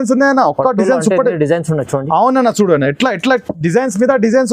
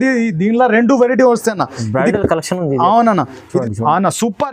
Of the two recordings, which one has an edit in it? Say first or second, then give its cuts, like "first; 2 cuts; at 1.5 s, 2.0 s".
second; 1 cut; at 3.5 s